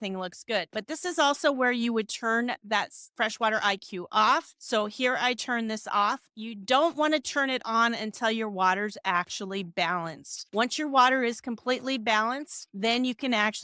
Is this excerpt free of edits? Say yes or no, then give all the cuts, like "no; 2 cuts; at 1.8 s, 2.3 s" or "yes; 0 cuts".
no; 1 cut; at 6.3 s